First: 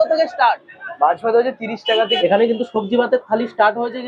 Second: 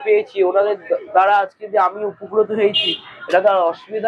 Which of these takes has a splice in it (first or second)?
first